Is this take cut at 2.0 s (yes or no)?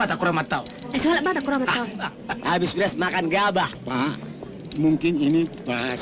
yes